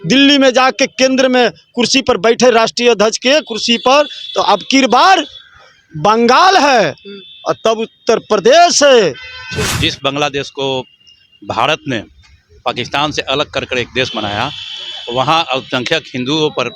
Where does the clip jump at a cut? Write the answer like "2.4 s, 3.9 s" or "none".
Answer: 9.8 s